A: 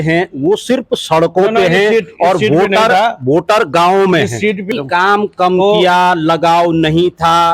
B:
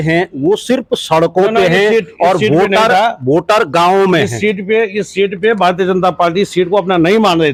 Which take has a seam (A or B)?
A